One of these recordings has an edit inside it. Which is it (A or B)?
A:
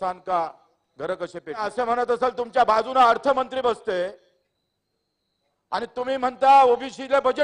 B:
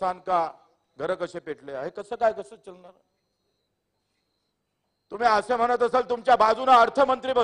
A